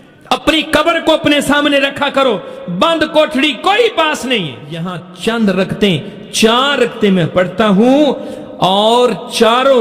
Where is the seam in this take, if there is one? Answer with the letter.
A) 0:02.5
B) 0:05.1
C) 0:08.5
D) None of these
B